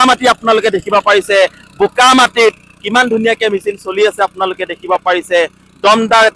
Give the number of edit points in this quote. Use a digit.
0